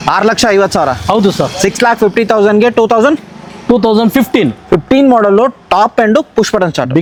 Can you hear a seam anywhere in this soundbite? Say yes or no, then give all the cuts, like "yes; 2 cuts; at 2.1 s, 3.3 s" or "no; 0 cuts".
no; 0 cuts